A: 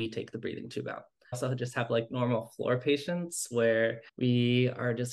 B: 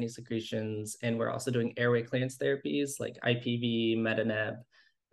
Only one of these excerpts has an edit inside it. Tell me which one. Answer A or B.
A